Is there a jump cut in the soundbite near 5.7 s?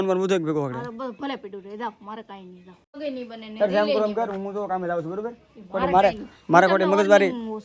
no; 1 cut; at 2.9 s

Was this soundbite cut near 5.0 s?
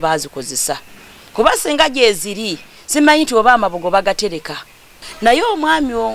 yes; 1 cut; at 5.0 s

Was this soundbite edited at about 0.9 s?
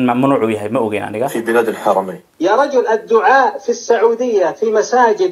no; 1 cut; at 2.3 s

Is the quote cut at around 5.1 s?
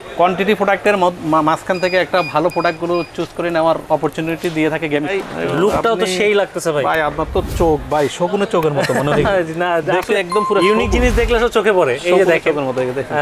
yes; 1 cut; at 5.1 s

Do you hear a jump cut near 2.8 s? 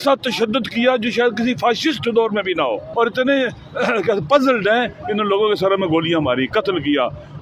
yes; 1 cut; at 2.8 s

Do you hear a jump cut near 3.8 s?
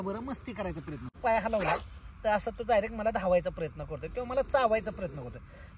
no; 1 cut; at 1.2 s

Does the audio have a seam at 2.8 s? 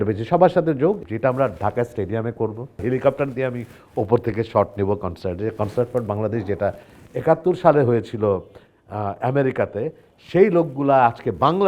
yes; 2 cuts; at 1.0 s, 2.8 s

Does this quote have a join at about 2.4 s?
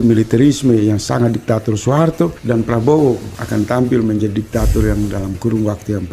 yes; 2 cuts; at 2.4 s, 3.3 s

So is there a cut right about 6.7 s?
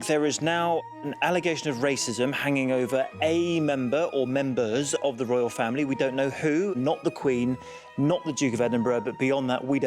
yes; 2 cuts; at 0.9 s, 6.7 s

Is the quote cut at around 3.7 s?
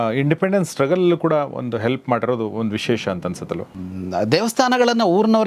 yes; 1 cut; at 3.7 s

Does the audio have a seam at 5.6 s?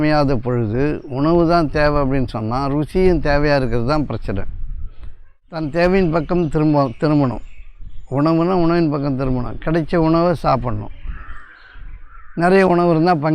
yes; 1 cut; at 5.6 s

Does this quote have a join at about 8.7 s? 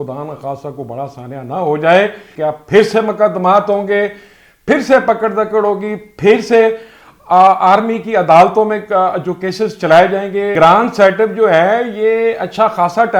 no; 2 cuts; at 2.2 s, 10.6 s

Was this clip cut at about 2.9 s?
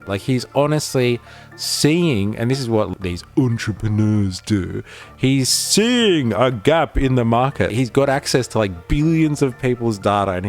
yes; 2 cuts; at 2.9 s, 7.7 s

